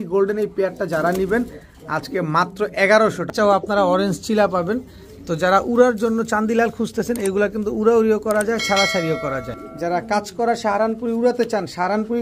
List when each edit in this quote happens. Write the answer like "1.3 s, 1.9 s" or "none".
3.3 s, 9.6 s